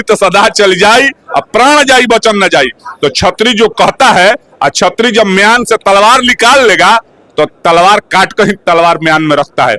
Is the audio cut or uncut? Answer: uncut